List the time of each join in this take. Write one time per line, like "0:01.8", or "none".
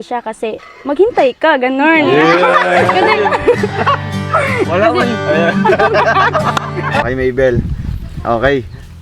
0:07.0